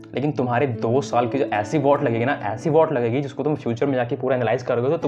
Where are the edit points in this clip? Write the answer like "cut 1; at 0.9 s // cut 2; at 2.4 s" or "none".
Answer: none